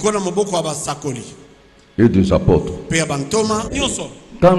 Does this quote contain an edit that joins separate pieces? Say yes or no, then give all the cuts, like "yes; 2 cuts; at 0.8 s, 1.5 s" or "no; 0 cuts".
yes; 1 cut; at 3.7 s